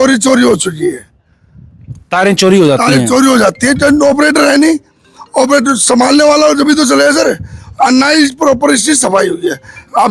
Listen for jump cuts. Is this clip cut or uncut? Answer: uncut